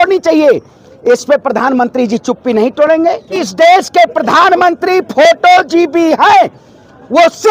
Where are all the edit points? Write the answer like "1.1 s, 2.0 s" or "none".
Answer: 3.5 s